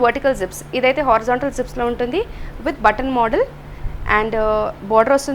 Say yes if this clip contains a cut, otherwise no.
no